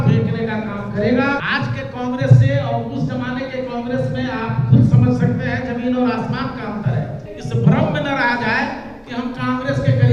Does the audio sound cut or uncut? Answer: cut